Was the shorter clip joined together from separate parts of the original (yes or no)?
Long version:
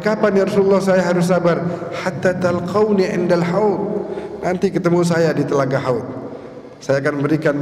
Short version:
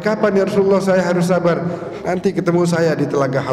yes